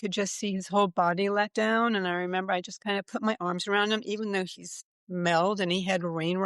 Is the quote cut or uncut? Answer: uncut